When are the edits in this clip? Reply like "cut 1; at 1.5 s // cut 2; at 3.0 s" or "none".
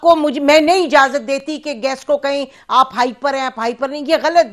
none